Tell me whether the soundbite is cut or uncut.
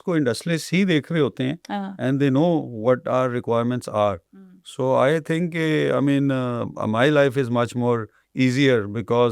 uncut